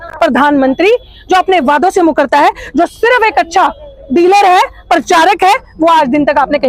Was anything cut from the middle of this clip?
no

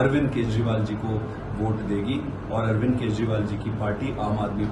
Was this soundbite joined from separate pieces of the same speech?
no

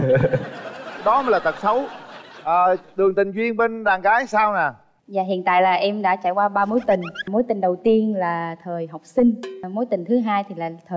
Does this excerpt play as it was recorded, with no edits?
yes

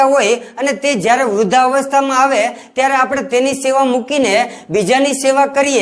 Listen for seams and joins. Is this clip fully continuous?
yes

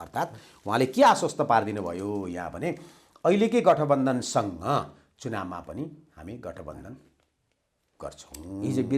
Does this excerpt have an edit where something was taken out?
no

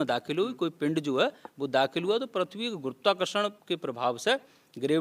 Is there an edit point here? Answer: no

